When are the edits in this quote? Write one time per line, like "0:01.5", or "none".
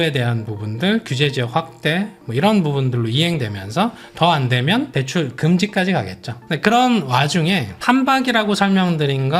0:06.4